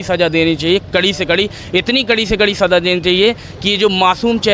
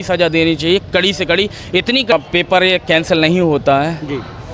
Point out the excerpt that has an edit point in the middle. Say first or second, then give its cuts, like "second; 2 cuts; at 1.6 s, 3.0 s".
second; 1 cut; at 2.1 s